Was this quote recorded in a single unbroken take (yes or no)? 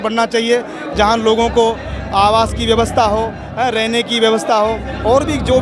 yes